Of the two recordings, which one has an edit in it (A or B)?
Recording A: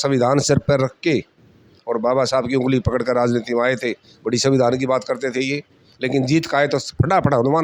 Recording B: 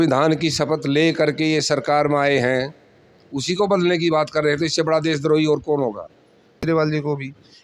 B